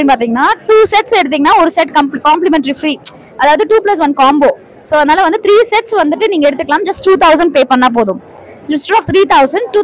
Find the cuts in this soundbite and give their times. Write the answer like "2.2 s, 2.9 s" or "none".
none